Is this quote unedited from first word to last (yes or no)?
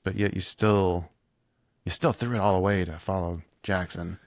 yes